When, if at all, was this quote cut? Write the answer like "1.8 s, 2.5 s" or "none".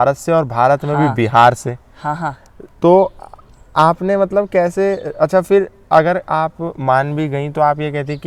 none